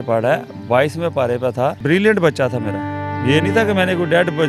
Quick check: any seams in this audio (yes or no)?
yes